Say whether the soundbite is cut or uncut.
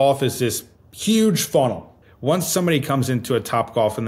cut